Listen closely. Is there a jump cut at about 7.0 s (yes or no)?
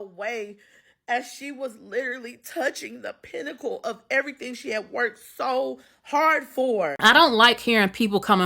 yes